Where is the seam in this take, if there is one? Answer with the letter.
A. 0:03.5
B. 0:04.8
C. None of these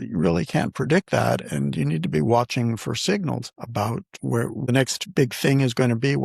B